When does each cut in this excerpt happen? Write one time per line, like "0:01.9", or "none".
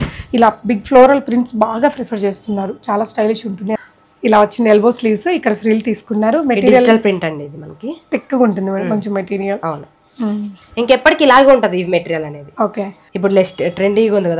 0:03.8
0:13.0